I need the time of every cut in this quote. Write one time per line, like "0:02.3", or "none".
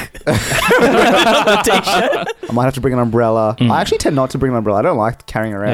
0:02.3